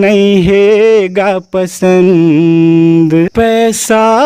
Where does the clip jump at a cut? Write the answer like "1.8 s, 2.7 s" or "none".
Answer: 3.3 s